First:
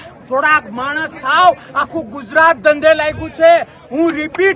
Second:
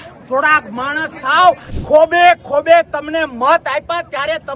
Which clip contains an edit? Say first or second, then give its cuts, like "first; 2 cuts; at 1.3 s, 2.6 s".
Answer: second; 1 cut; at 1.7 s